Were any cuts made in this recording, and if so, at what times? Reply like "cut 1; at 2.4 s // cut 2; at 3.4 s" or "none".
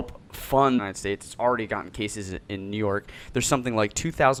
none

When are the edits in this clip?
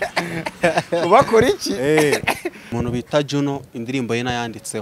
cut 1; at 2.6 s

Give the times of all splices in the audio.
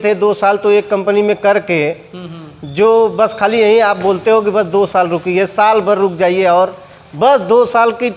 none

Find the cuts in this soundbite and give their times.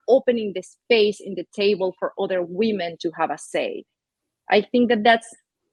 none

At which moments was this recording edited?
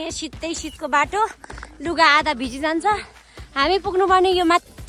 none

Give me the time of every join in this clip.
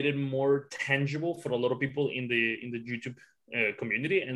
none

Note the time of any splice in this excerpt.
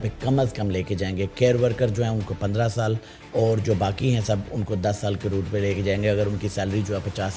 none

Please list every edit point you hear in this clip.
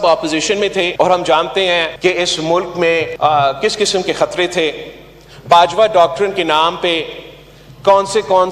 cut 1; at 0.9 s // cut 2; at 1.9 s // cut 3; at 3.1 s

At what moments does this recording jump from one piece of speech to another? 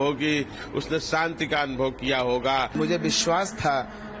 cut 1; at 2.8 s

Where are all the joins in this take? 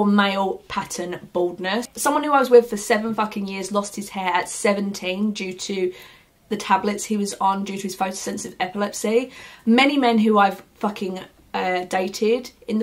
none

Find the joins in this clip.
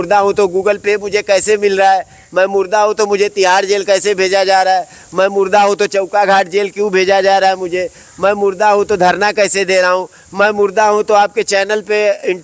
none

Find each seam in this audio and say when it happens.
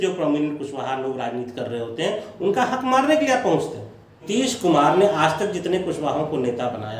cut 1; at 4.3 s

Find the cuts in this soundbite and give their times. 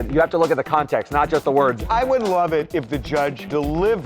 cut 1; at 1.8 s

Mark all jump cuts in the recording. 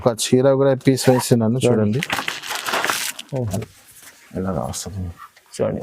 cut 1; at 3.6 s

